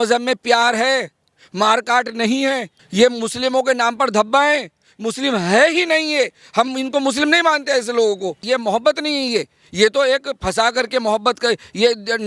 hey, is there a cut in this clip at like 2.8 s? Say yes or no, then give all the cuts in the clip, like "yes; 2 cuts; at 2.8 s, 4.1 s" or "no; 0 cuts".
yes; 2 cuts; at 2.8 s, 8.4 s